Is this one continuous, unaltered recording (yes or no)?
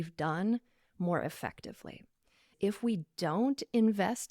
no